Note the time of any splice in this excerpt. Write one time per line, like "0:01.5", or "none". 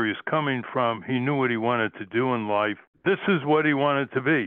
0:02.9